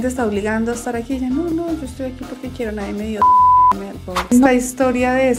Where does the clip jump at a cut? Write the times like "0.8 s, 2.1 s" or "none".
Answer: 4.3 s